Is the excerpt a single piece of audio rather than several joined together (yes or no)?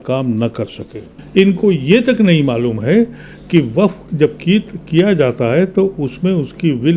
no